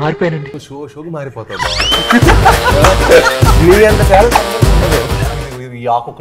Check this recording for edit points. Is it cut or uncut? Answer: cut